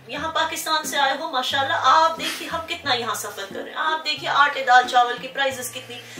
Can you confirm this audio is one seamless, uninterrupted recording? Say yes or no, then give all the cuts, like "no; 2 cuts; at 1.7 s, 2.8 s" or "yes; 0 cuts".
yes; 0 cuts